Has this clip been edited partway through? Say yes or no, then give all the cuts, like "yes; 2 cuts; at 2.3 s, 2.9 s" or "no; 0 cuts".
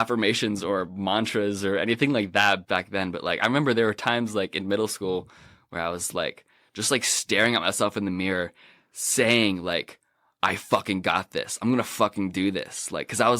yes; 1 cut; at 2.6 s